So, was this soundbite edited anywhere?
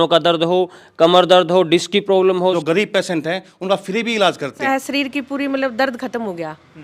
yes; 2 cuts; at 2.6 s, 4.7 s

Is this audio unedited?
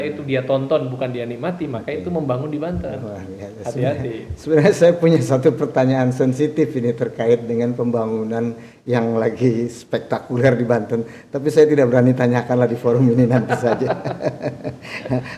yes; 0 cuts

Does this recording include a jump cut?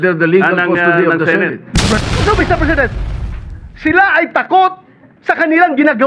yes; 1 cut; at 2.0 s

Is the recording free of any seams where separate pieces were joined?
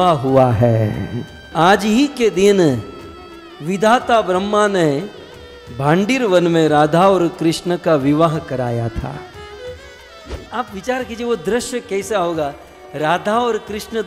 no; 2 cuts; at 1.5 s, 10.4 s

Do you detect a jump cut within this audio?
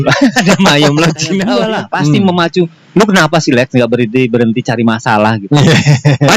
yes; 1 cut; at 1.5 s

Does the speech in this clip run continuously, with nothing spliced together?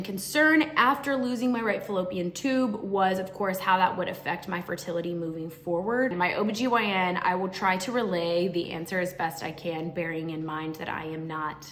yes; 0 cuts

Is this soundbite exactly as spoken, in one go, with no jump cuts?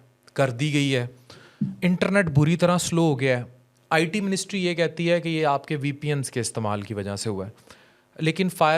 yes; 0 cuts

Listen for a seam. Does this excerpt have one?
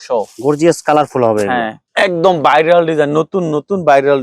yes; 1 cut; at 1.8 s

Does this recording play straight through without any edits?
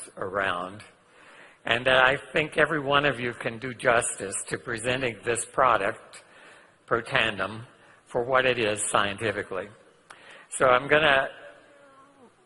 yes; 0 cuts

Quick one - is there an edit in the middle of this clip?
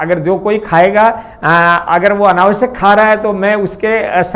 no; 0 cuts

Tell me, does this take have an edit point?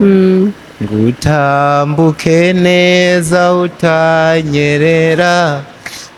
no; 0 cuts

